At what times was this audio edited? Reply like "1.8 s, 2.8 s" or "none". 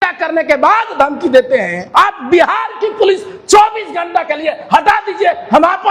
1.8 s

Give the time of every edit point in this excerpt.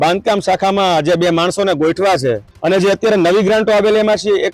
2.5 s

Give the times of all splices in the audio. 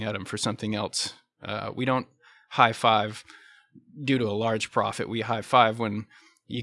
none

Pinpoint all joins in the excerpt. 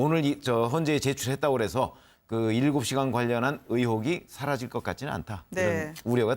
4.7 s

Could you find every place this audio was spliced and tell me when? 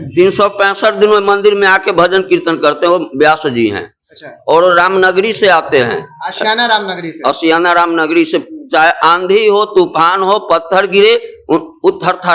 none

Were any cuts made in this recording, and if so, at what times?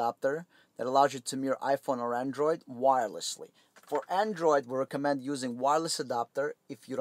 none

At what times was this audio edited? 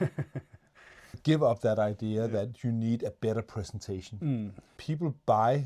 1.2 s, 4.7 s

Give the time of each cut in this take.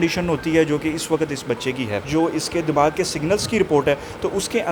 2.0 s

